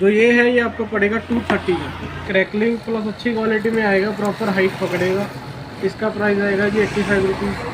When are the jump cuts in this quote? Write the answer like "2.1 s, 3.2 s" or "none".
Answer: 2.2 s

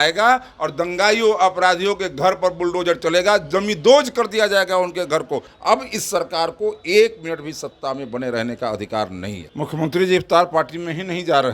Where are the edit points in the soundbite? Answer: 5.5 s, 9.4 s

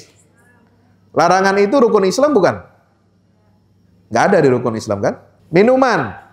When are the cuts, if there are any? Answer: 5.3 s

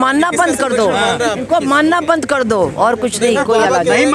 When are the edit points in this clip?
none

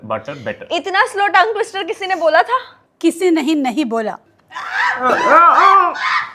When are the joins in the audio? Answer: 4.3 s

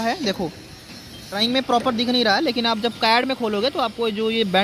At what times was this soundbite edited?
1.4 s

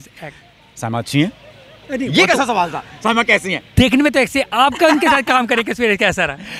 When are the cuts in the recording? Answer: none

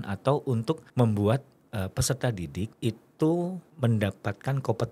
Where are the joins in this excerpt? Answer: 0.9 s, 2.7 s, 3.6 s

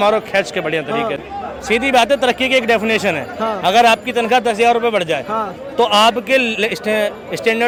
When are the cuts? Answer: none

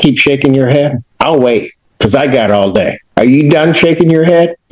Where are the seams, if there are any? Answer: 1.1 s, 3.0 s

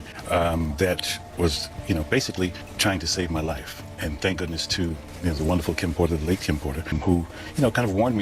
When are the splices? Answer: 1.5 s, 2.7 s, 5.0 s, 6.9 s

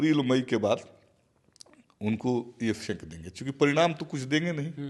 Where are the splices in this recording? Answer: none

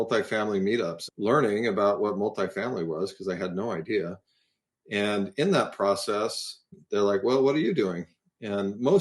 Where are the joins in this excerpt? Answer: 1.0 s, 6.8 s

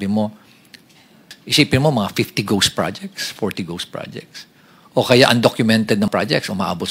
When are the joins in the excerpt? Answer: 1.3 s, 6.1 s

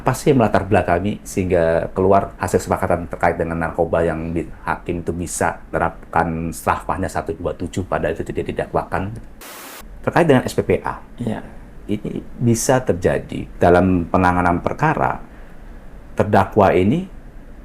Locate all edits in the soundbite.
1.2 s, 2.3 s, 5.7 s, 9.7 s, 13.4 s

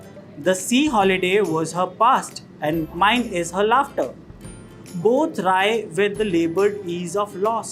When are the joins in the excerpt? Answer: 2.8 s

